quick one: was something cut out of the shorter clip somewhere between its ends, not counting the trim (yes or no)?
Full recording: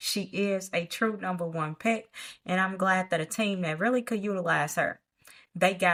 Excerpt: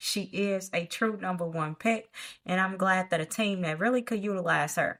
no